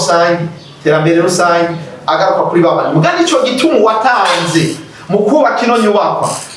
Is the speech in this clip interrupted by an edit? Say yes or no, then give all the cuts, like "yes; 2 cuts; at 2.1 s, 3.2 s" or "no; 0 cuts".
no; 0 cuts